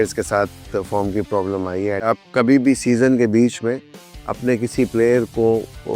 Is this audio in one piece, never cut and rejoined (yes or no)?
no